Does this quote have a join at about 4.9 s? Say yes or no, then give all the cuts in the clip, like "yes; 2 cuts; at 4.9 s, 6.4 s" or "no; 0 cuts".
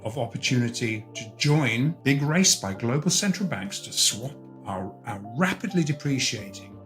no; 1 cut; at 2.0 s